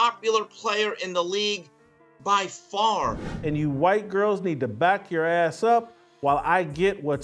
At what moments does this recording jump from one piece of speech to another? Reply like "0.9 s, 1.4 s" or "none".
3.3 s